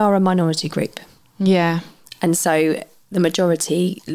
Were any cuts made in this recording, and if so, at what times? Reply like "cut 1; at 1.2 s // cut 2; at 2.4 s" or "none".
none